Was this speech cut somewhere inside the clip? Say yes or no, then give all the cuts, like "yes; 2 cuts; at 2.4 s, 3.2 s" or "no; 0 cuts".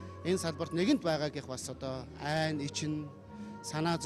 no; 0 cuts